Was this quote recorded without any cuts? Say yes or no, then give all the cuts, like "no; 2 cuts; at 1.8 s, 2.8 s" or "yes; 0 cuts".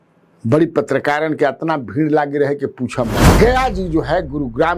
no; 1 cut; at 3.2 s